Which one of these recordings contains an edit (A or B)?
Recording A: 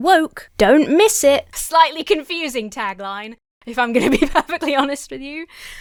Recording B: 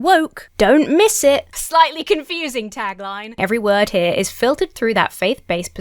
B